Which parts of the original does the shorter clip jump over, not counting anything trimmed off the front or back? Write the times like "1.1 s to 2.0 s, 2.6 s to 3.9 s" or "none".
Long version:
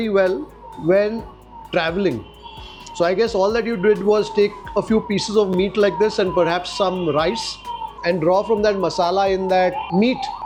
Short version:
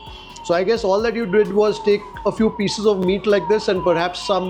none